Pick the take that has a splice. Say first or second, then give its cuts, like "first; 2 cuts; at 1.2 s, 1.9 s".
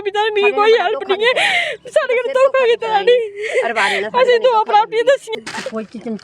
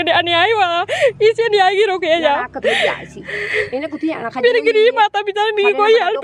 first; 1 cut; at 5.3 s